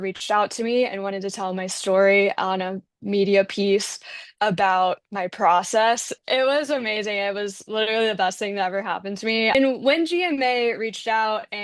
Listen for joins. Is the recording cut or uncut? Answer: uncut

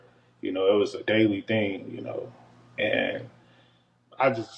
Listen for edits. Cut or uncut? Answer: uncut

